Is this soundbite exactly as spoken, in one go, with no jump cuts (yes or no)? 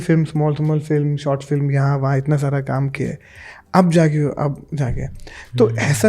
yes